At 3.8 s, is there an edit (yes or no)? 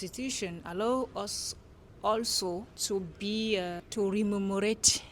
yes